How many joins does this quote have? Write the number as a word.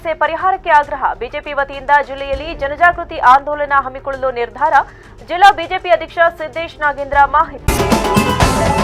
one